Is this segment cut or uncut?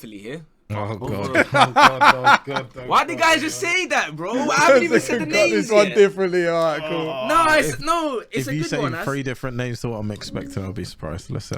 uncut